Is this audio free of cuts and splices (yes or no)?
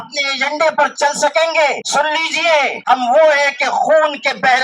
no